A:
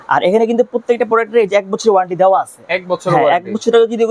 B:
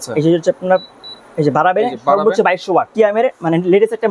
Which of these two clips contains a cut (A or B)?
B